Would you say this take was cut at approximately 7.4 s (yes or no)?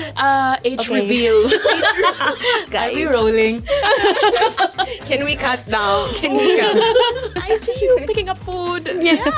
yes